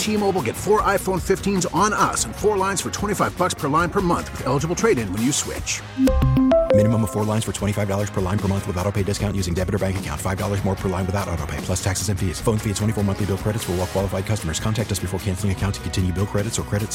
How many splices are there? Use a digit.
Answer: 0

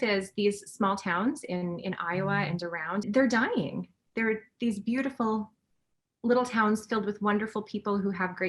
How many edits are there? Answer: 1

